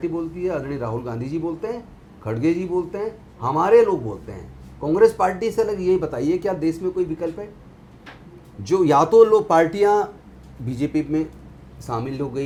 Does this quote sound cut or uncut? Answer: uncut